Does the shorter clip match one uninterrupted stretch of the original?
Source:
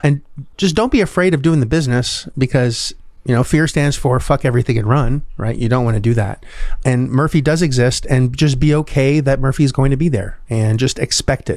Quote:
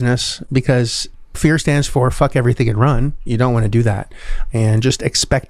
no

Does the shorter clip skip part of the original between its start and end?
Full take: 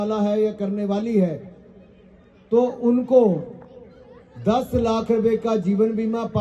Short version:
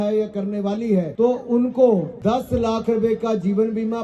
yes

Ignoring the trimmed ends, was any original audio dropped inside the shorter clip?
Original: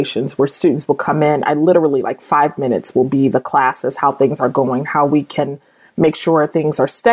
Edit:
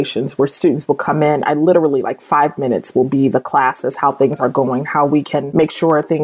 yes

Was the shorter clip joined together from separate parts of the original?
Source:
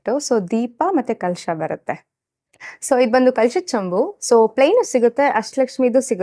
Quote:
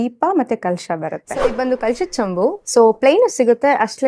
yes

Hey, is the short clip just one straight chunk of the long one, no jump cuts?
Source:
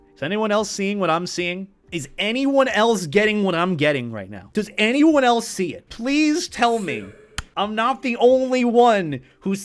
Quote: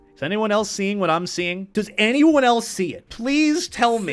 no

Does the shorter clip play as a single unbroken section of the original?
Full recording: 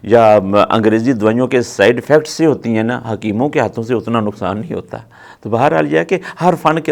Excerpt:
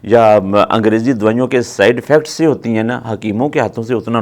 yes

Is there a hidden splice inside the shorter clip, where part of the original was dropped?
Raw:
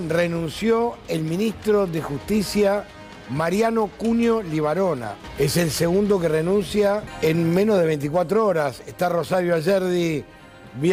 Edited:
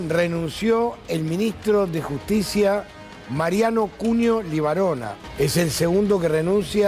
no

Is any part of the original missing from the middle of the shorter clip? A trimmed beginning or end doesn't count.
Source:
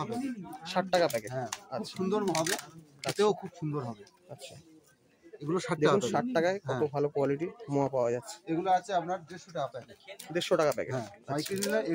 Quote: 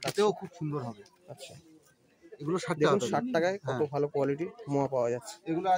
no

